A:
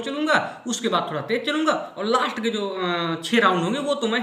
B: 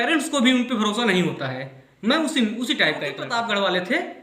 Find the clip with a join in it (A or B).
B